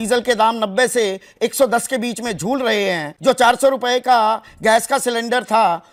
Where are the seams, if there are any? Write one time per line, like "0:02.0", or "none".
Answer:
none